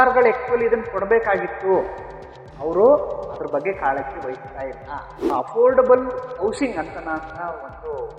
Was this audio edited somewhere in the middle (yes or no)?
yes